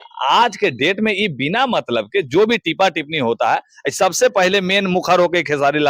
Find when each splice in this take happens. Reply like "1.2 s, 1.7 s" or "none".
none